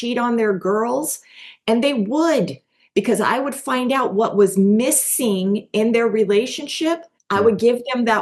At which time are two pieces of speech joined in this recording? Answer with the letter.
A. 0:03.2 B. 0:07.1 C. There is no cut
B